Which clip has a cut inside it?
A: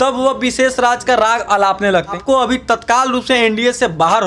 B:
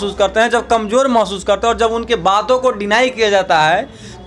A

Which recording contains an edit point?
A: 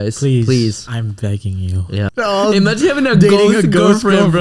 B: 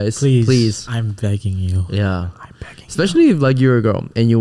A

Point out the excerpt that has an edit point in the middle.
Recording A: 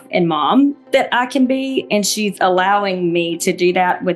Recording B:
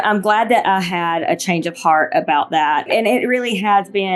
B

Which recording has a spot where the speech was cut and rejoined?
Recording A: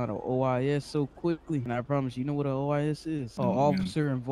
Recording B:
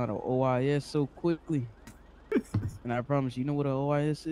A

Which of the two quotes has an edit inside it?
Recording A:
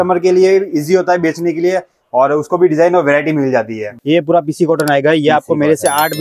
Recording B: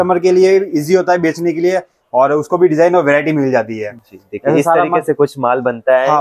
A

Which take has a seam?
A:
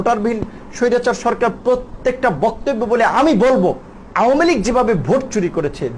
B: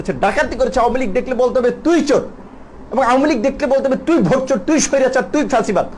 A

